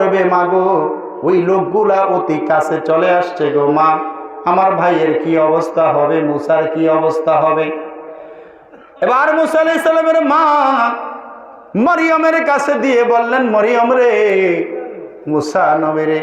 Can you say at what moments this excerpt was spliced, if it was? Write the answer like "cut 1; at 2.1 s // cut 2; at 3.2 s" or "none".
none